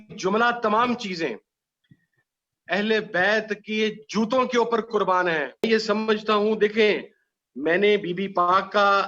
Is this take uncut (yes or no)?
no